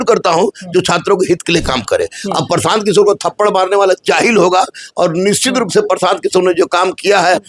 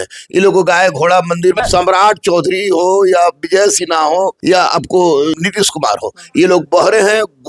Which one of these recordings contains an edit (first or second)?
second